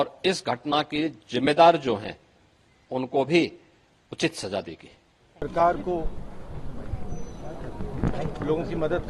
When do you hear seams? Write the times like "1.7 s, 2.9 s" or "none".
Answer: none